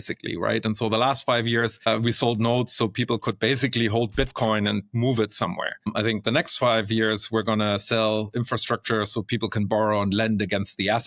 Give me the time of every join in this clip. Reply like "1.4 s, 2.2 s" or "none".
none